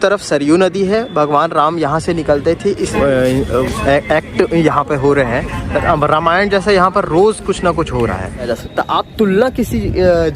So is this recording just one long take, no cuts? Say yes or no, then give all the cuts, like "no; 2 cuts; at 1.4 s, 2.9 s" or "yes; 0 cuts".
no; 2 cuts; at 2.9 s, 8.5 s